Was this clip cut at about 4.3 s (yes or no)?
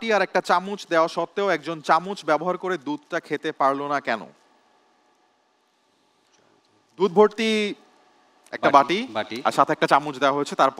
no